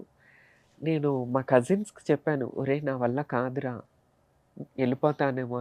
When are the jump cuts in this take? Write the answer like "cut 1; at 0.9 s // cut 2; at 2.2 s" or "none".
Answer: none